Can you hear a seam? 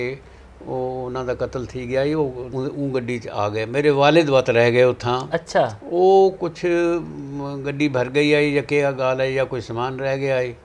yes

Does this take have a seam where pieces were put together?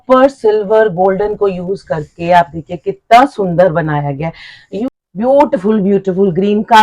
yes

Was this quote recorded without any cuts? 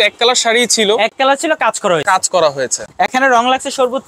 yes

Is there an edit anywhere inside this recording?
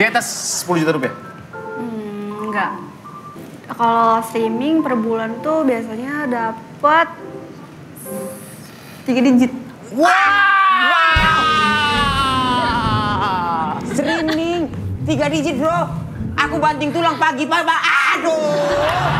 yes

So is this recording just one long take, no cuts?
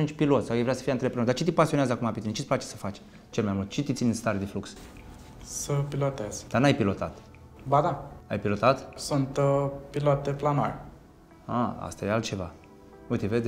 yes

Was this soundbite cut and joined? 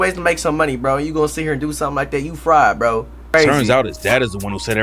yes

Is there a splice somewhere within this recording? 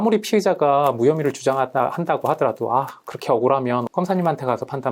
yes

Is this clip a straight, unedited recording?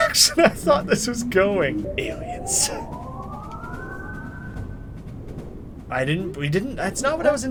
yes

